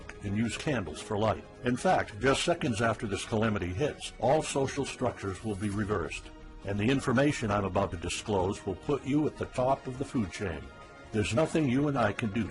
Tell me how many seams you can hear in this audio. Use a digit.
0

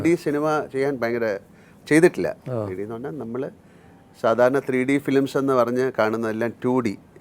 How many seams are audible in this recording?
0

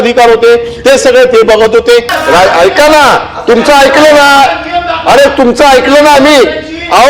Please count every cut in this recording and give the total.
1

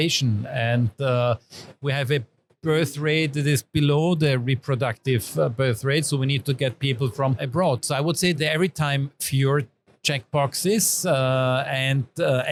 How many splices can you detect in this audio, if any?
0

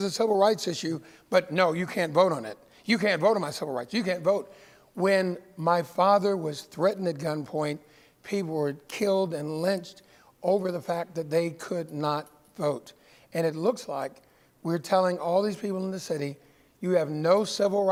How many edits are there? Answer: 0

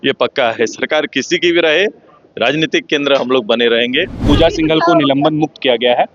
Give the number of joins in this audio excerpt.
1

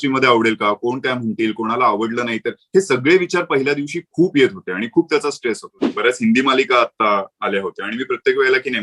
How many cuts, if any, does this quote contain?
1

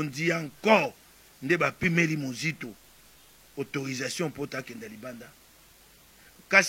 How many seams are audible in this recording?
0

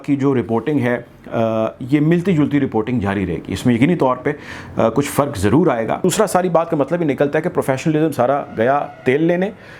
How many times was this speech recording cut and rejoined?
1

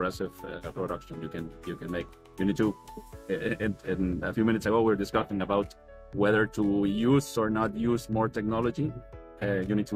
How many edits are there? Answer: 0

